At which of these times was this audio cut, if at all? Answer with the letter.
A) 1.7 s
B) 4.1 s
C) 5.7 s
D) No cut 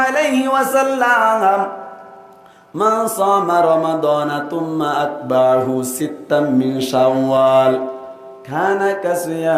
D